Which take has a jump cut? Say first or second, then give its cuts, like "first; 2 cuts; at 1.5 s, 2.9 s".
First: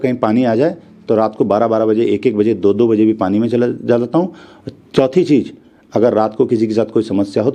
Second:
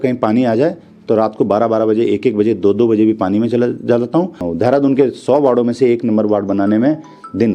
second; 1 cut; at 4.5 s